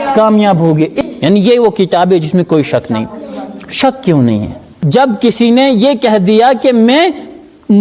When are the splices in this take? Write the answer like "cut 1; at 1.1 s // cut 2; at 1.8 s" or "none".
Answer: cut 1; at 0.9 s // cut 2; at 4.8 s